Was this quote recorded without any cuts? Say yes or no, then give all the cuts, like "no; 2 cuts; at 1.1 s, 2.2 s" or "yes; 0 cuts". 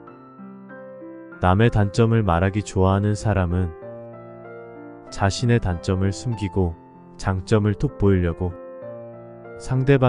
yes; 0 cuts